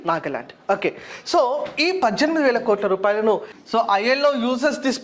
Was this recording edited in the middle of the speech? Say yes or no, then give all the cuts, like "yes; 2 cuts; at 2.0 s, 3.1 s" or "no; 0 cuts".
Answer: yes; 1 cut; at 3.5 s